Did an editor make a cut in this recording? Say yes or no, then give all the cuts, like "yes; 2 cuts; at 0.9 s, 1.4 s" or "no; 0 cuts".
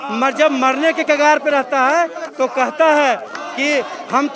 no; 0 cuts